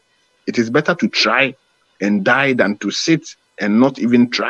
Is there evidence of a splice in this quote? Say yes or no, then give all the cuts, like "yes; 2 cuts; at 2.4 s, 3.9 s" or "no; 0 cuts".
no; 0 cuts